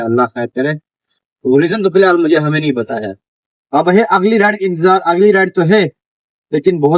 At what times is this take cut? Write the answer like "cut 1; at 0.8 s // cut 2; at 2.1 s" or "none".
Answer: none